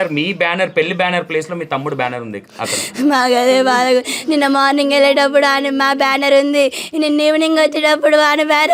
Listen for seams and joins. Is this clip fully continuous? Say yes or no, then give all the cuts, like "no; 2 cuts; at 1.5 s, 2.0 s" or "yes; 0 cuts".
yes; 0 cuts